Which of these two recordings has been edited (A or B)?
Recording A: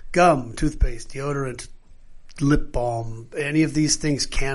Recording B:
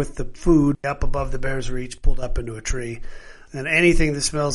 B